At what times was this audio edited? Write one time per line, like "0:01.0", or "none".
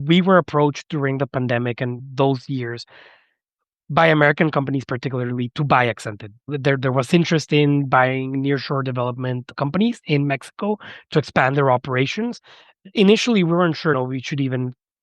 0:12.9